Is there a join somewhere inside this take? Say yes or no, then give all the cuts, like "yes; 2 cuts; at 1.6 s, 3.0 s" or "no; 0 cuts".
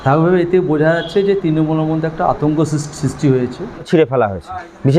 yes; 1 cut; at 3.9 s